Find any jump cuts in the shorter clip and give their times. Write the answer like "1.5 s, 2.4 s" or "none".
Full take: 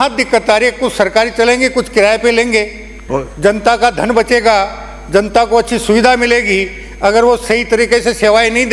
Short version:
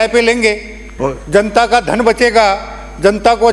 none